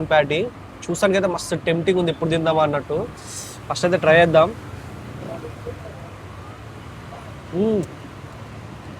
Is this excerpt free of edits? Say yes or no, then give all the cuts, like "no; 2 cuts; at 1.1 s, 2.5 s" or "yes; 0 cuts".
yes; 0 cuts